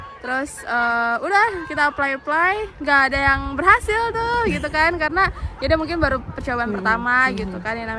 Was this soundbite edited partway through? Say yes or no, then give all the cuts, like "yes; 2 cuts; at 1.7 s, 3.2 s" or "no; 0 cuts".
no; 0 cuts